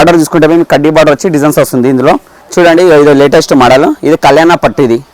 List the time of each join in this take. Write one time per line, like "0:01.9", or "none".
0:02.4